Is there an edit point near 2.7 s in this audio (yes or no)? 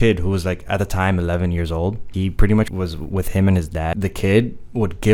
yes